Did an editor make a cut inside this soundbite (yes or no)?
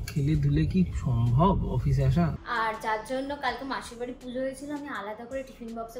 yes